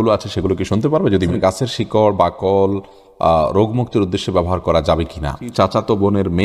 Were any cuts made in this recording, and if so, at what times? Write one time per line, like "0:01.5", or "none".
0:01.3
0:05.5